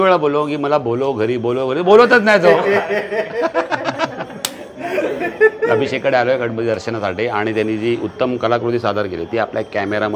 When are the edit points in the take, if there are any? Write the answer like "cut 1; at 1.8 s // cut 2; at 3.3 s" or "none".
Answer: none